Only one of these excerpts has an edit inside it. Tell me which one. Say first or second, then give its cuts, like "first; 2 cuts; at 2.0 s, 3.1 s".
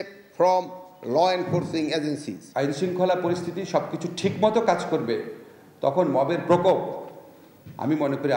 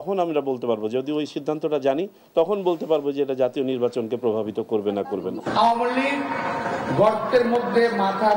first; 2 cuts; at 2.4 s, 6.4 s